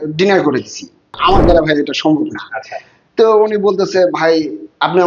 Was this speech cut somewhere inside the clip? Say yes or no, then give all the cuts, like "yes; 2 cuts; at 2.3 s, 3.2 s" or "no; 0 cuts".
yes; 1 cut; at 1.1 s